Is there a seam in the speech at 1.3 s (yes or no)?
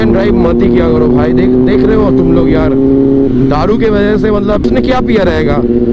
no